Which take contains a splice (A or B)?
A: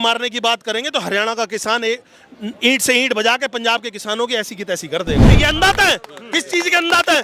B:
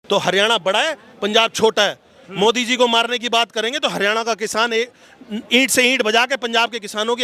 A